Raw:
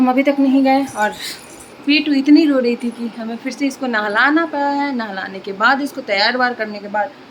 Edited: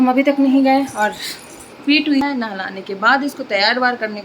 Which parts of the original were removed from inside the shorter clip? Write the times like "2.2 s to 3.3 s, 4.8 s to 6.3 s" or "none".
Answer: 2.2 s to 4.8 s